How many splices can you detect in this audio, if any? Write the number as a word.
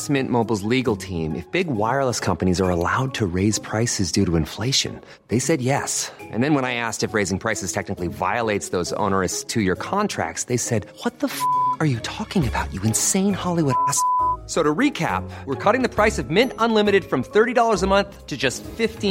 zero